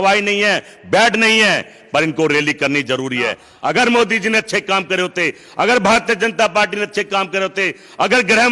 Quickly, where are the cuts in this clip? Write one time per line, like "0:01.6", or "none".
0:03.5